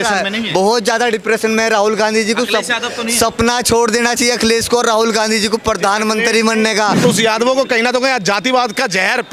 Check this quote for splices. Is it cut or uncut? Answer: cut